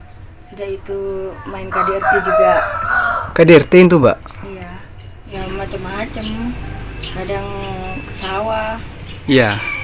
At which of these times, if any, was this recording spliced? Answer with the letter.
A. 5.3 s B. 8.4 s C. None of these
A